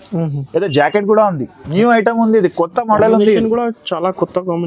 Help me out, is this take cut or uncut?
cut